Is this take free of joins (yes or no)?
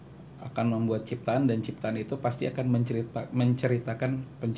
yes